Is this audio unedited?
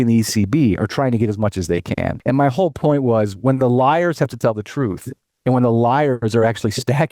no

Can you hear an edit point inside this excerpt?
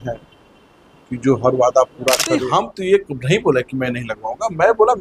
yes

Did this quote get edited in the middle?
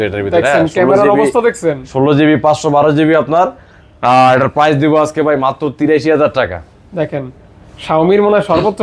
no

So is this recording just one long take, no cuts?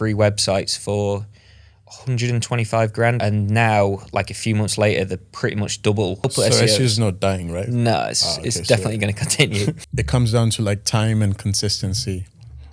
no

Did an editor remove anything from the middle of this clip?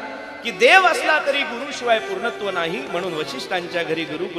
no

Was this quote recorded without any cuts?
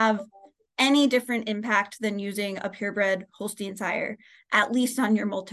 yes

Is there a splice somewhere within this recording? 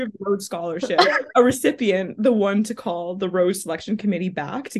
no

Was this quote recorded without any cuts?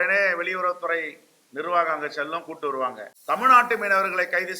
no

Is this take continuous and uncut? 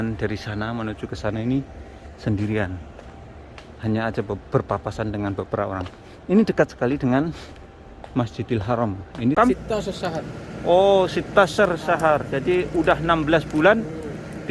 no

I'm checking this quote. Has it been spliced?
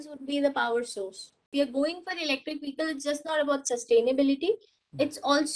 yes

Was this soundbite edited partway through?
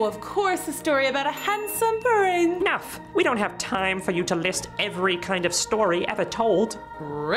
yes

